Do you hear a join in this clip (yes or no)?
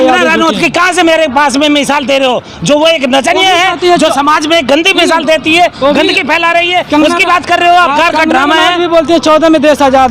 yes